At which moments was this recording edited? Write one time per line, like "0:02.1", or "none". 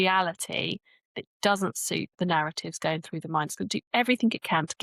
0:02.1